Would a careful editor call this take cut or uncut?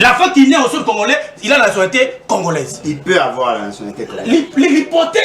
uncut